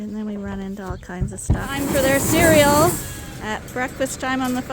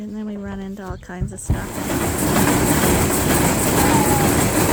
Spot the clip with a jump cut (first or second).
first